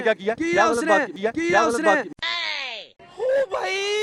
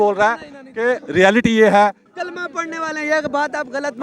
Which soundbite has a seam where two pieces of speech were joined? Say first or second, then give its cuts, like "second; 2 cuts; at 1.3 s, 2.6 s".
second; 1 cut; at 2.0 s